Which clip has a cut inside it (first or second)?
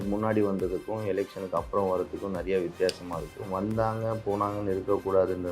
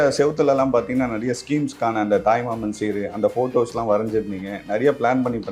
first